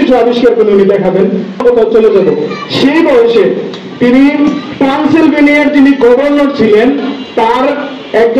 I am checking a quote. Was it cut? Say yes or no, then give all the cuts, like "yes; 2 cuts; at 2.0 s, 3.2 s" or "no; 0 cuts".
yes; 1 cut; at 1.6 s